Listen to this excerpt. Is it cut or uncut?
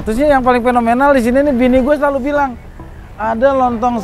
uncut